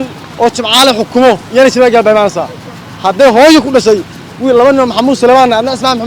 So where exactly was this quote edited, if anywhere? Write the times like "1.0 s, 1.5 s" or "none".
none